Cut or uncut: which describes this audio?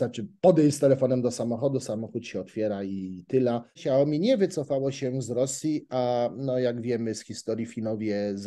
cut